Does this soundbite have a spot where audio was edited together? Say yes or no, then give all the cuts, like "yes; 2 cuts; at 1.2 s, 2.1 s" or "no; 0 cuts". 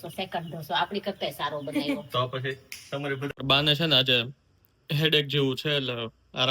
yes; 1 cut; at 3.3 s